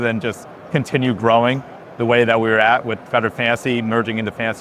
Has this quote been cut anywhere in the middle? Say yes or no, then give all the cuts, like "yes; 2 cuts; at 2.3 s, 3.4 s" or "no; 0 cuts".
no; 0 cuts